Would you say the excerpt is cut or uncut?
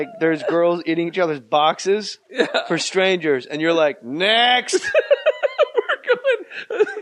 uncut